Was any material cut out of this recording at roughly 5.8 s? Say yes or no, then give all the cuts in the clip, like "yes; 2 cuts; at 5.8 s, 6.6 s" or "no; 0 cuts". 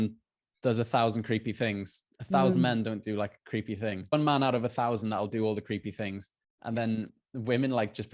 no; 2 cuts; at 4.1 s, 7.2 s